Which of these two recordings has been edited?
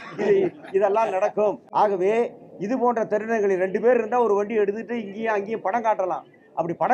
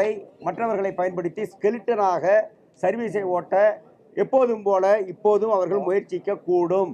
first; 1 cut; at 1.6 s

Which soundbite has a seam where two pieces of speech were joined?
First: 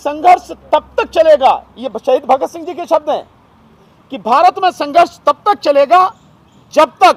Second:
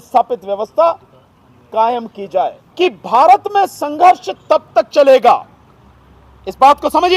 second; 1 cut; at 2.6 s

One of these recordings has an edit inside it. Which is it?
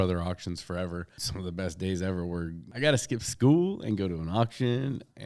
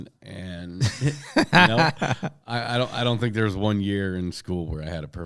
first; 2 cuts; at 1.3 s, 2.6 s

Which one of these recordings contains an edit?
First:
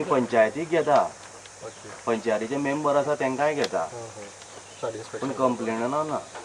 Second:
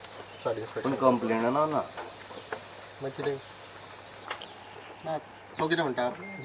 second; 1 cut; at 4.2 s

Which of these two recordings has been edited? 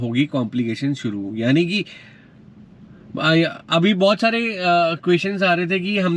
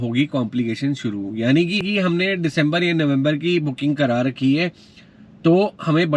second; 1 cut; at 1.8 s

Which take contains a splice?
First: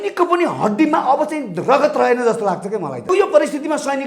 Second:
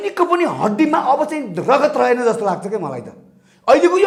first; 1 cut; at 3.1 s

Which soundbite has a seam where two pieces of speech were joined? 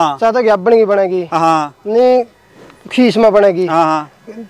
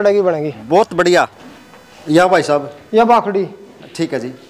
second; 1 cut; at 1.4 s

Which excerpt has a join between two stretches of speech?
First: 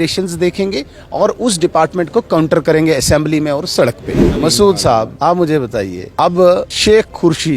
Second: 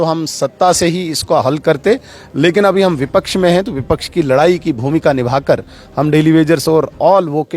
first; 4 cuts; at 4.2 s, 5.1 s, 6.0 s, 6.7 s

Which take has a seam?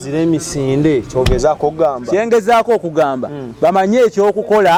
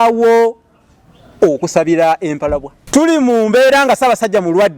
second; 1 cut; at 2.8 s

